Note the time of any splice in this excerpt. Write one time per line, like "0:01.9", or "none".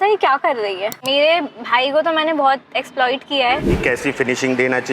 0:01.0
0:03.7